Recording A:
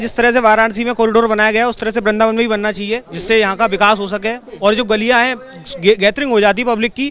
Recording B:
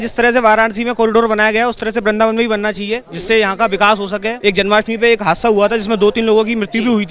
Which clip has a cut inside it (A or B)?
B